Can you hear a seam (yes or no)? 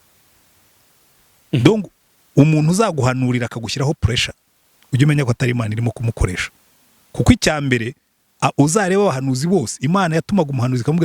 no